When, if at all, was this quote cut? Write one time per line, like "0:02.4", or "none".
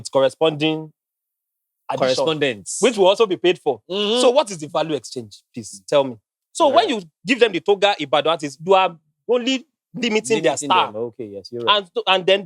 0:06.4